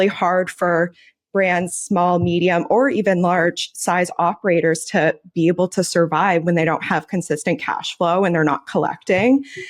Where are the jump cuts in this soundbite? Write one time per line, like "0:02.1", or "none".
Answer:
0:06.4